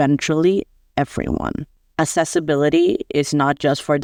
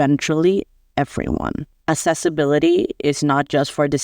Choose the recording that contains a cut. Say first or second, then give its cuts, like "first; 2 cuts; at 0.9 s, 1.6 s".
second; 1 cut; at 1.7 s